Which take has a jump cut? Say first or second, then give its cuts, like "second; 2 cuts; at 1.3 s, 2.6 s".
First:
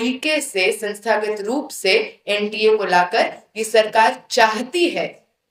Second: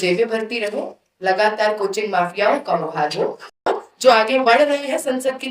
second; 1 cut; at 3.7 s